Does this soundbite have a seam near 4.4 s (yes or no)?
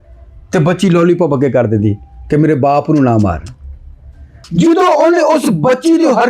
yes